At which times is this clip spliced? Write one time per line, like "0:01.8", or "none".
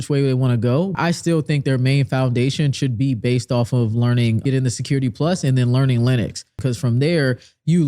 0:01.0
0:04.4
0:06.5

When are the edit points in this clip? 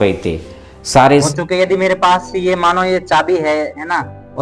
0:01.3

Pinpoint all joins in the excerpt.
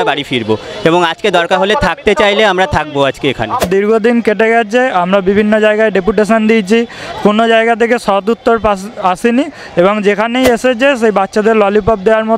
0:03.6

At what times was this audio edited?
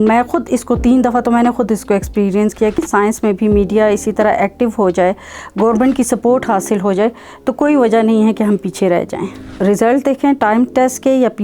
0:02.8
0:09.5

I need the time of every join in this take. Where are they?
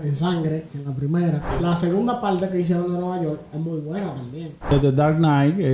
0:01.5
0:04.7

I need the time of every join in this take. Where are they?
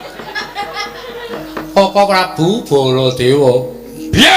0:01.4

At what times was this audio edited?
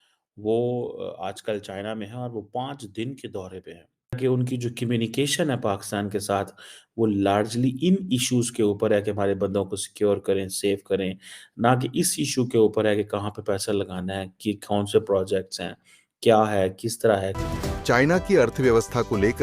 0:03.9
0:17.4

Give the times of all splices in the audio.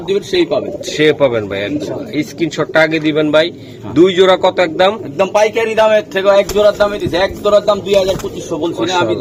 none

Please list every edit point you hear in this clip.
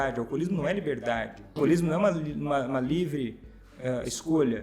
0:01.6

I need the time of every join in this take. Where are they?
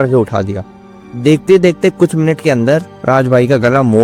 none

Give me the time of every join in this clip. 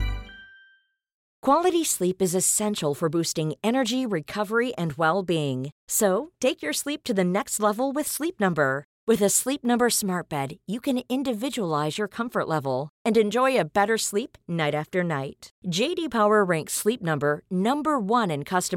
0:01.3

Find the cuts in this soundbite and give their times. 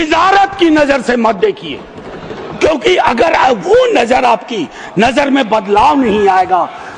none

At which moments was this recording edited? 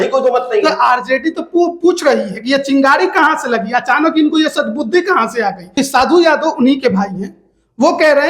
0:05.6

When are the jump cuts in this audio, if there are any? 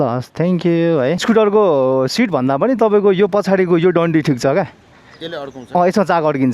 0:01.2

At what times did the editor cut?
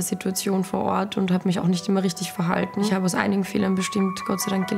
0:02.9

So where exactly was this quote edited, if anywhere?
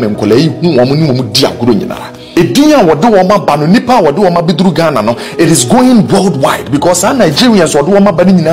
0:02.2

